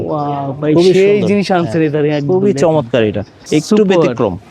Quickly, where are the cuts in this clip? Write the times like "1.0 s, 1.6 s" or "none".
none

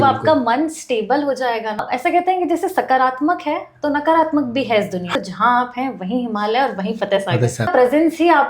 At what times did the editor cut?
1.8 s, 5.1 s, 7.7 s

